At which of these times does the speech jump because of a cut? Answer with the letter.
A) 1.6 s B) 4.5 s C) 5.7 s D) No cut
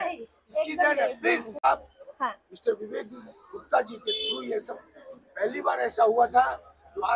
A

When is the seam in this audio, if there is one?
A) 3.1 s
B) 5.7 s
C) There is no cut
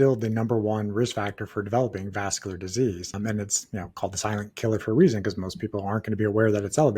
A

